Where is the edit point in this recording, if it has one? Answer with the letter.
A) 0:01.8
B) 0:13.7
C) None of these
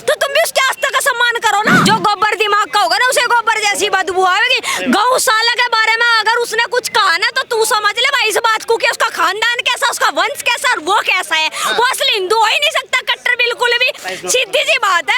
A